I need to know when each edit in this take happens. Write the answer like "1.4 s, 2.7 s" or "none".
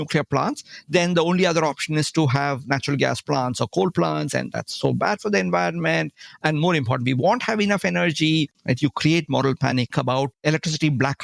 8.6 s, 10.0 s

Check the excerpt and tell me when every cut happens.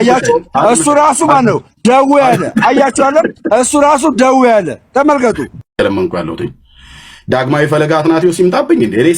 5.6 s

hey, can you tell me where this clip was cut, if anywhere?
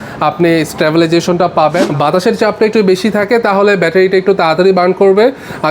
1.8 s

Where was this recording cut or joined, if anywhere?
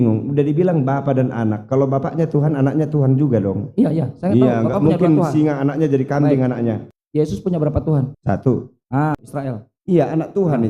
6.9 s, 9.2 s

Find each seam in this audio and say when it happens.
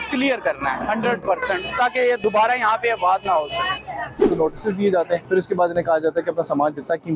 4.3 s, 5.2 s

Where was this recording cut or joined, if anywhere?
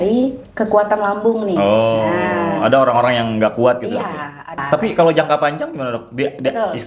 4.5 s

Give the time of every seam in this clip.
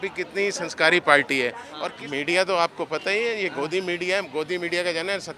1.7 s

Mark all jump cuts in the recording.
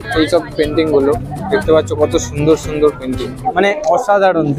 3.5 s

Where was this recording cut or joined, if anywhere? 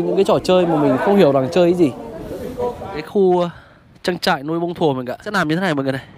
3.0 s, 5.3 s

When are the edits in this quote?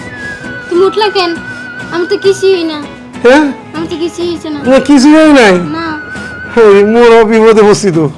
none

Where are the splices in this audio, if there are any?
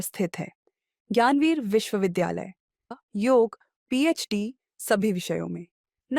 2.9 s

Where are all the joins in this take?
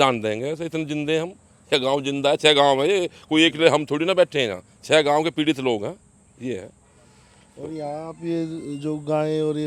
none

